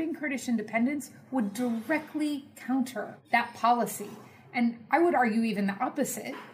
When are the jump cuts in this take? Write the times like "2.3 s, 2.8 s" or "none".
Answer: 3.2 s